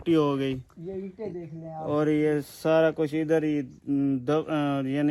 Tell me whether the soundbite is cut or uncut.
uncut